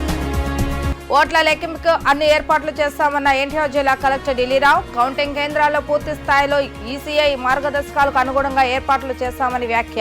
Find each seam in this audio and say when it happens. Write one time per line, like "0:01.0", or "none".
0:00.9